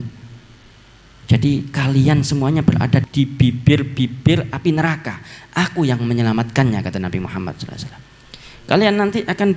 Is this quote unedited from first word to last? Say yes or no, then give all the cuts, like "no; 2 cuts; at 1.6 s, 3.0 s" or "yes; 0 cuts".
no; 1 cut; at 3.1 s